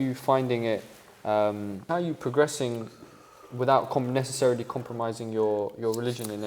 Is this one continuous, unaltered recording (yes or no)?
no